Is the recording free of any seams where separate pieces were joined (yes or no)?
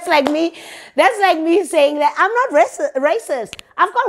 yes